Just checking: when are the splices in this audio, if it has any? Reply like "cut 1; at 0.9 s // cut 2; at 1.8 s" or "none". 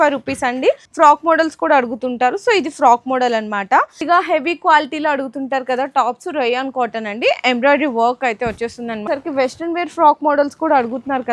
cut 1; at 0.9 s // cut 2; at 4.0 s // cut 3; at 9.0 s